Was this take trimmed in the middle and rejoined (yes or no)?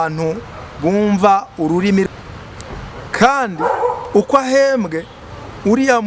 yes